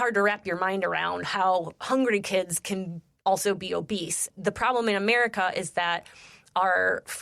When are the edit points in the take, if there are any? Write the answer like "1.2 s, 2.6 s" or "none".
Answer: 4.2 s